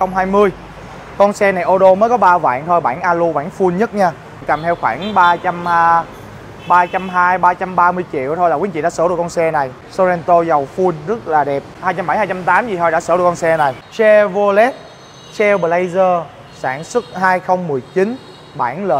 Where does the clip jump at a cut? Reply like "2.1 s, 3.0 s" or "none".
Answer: 4.4 s, 9.8 s, 11.7 s, 13.8 s